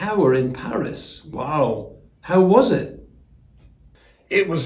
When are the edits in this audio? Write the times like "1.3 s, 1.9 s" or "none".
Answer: none